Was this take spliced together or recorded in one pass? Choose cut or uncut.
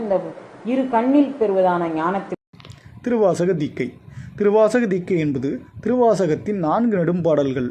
cut